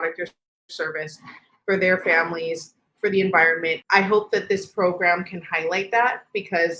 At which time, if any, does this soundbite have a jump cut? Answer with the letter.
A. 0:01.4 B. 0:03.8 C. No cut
B